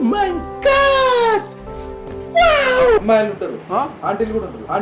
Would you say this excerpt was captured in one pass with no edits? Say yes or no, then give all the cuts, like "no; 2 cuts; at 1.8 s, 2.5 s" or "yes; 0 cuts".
yes; 0 cuts